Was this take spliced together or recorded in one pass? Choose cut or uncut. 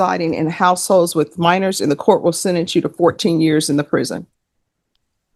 uncut